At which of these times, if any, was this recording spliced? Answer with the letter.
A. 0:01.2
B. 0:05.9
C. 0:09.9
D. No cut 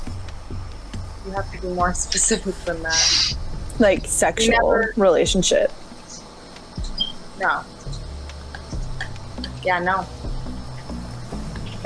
D